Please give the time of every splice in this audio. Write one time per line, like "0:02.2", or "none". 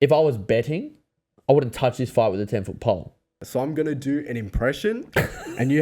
0:03.4